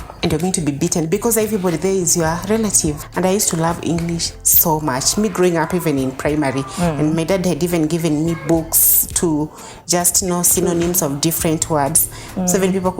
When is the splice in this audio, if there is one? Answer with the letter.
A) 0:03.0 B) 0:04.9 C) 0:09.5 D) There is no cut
A